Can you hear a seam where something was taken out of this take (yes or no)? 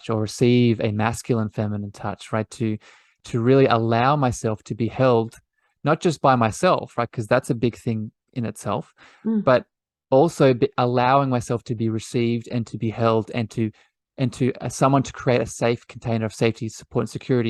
no